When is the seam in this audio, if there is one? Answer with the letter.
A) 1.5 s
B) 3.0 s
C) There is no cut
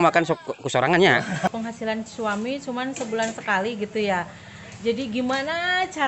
A